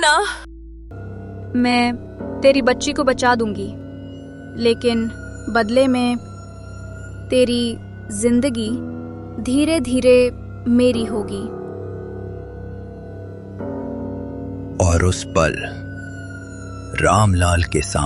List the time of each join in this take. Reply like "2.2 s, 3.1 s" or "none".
0.9 s